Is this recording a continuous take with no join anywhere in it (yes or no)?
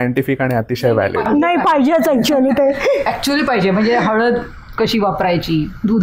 yes